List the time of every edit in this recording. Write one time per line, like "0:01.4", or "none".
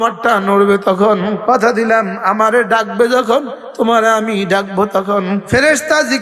0:01.4
0:05.4